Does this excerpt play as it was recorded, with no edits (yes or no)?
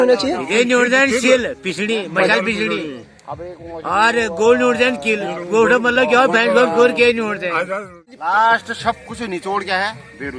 no